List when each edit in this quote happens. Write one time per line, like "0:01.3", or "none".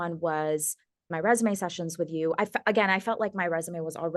0:01.1